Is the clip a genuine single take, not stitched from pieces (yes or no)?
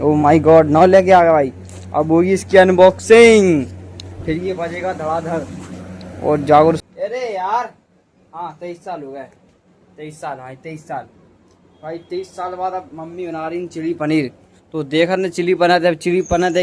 no